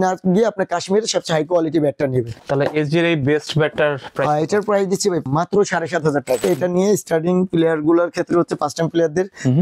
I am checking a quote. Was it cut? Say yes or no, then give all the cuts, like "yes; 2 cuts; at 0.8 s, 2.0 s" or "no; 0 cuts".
yes; 3 cuts; at 2.4 s, 5.3 s, 6.4 s